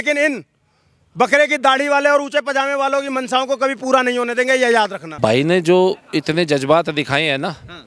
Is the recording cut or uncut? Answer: uncut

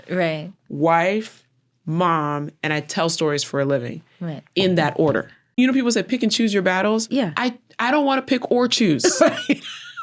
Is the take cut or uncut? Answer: cut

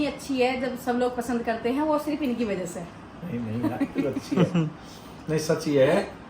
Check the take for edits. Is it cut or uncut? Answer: uncut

